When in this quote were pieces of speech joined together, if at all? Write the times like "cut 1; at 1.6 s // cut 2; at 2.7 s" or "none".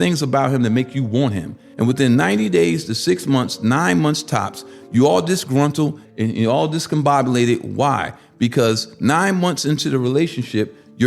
cut 1; at 1.6 s // cut 2; at 6.0 s